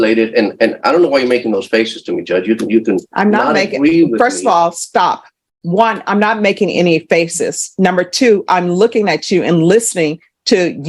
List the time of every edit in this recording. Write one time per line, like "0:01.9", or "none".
none